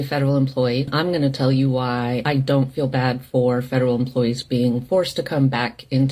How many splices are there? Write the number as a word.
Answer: two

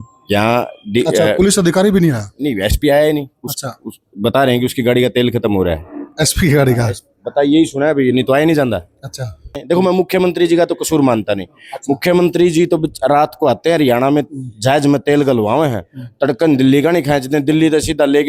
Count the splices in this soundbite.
one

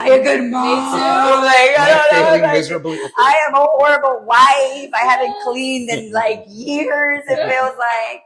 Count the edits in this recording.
zero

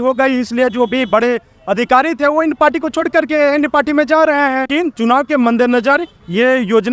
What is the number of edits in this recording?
one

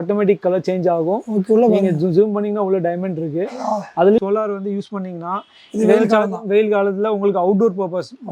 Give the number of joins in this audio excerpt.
one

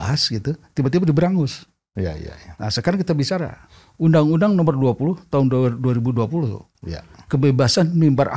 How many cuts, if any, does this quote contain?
zero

